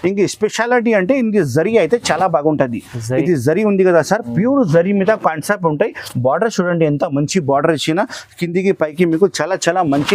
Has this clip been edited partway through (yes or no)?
no